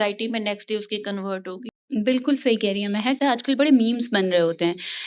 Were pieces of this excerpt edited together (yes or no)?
yes